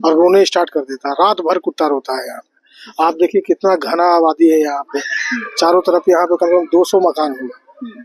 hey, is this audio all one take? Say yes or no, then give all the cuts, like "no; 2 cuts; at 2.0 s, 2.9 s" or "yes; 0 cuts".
yes; 0 cuts